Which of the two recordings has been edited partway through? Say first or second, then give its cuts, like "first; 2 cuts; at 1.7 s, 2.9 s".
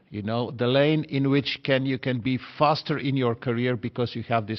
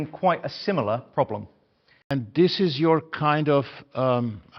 second; 1 cut; at 2.0 s